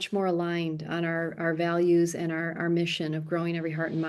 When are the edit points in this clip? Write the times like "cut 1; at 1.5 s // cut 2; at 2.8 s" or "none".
none

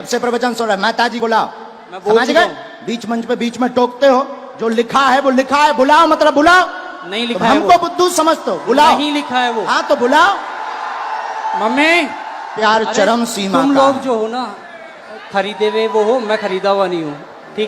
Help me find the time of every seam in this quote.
cut 1; at 1.2 s // cut 2; at 12.6 s

